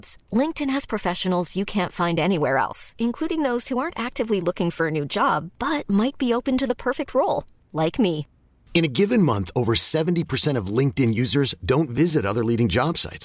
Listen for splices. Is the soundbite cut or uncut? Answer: uncut